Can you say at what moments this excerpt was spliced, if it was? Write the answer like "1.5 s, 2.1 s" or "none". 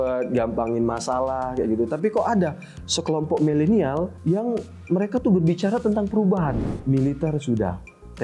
4.1 s, 6.7 s